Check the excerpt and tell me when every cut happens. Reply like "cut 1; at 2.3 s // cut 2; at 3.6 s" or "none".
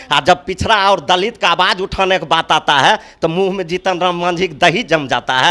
none